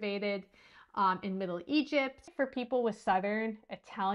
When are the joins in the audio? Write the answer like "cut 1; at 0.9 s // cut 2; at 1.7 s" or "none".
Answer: cut 1; at 2.3 s

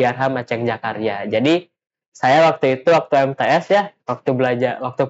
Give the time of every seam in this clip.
none

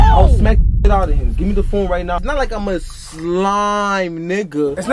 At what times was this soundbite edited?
cut 1; at 2.2 s

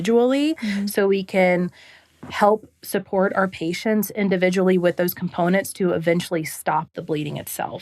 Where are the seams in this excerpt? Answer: cut 1; at 6.9 s

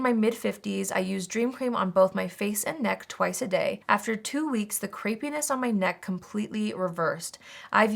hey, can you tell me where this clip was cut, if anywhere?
none

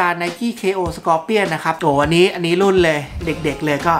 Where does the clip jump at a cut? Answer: cut 1; at 1.8 s

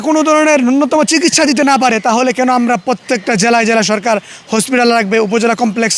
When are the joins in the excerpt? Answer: none

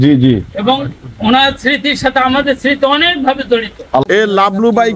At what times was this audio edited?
cut 1; at 4.1 s

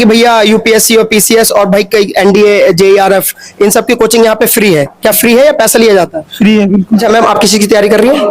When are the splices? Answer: cut 1; at 7.0 s

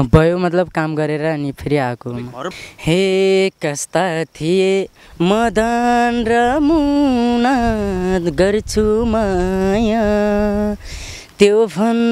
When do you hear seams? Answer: cut 1; at 2.5 s

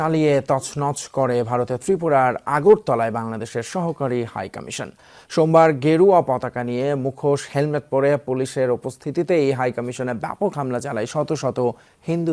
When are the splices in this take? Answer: none

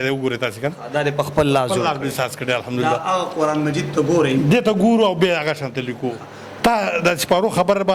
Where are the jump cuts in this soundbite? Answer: cut 1; at 6.4 s

